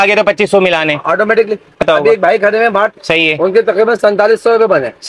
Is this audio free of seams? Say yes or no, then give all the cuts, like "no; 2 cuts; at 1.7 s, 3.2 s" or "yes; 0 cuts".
no; 2 cuts; at 1.8 s, 3.0 s